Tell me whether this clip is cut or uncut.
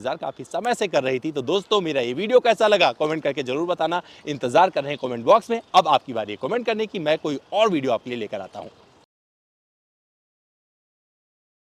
uncut